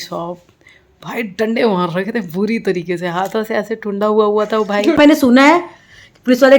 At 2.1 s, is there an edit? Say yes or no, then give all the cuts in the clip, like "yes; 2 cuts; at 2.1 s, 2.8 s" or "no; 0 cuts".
no; 1 cut; at 5.0 s